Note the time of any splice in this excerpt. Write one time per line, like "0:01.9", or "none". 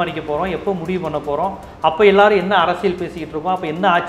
none